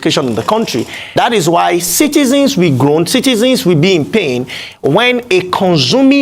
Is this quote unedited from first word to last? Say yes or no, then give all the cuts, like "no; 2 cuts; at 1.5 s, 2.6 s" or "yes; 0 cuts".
no; 1 cut; at 1.1 s